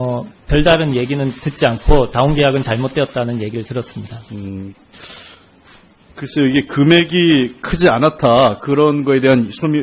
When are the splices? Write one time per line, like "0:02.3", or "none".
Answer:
0:05.1